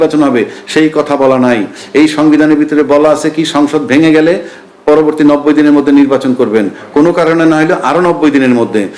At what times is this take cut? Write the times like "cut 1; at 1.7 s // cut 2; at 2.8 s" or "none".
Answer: none